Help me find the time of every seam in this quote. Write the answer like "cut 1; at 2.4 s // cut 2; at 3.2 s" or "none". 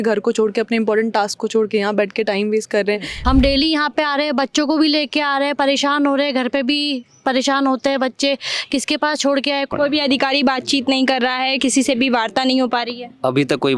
cut 1; at 3.1 s // cut 2; at 9.7 s